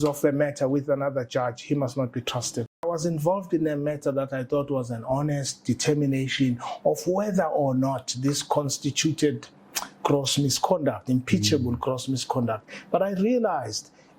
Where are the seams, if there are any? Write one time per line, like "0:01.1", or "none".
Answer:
0:02.8